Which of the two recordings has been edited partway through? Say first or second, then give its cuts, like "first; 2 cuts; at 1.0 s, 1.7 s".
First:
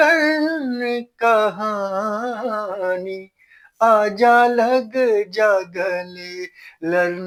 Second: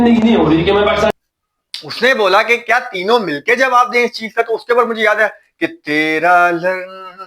second; 1 cut; at 1.1 s